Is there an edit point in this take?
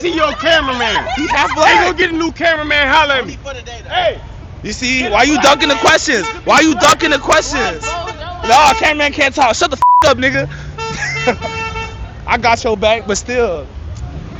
no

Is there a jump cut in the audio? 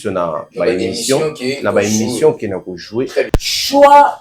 yes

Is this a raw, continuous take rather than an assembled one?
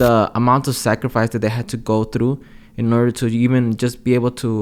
yes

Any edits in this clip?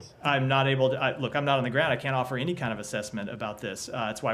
no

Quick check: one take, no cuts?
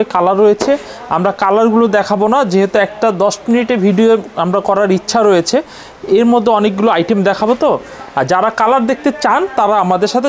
yes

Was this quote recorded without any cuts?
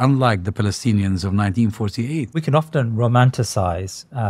no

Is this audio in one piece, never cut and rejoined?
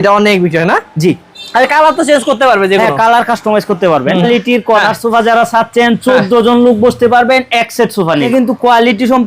no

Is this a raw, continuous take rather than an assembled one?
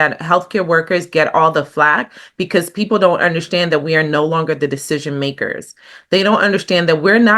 yes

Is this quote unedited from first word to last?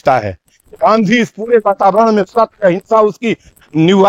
yes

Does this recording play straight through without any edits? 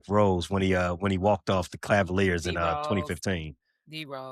yes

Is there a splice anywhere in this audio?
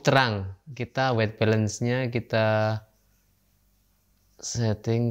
no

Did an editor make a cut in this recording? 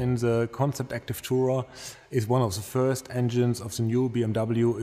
no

